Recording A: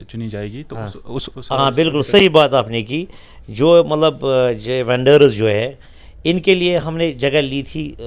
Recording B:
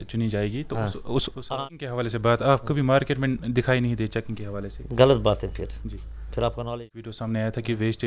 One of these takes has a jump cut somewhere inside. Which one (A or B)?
B